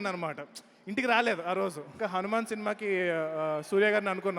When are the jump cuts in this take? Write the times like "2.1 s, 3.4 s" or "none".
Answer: 1.9 s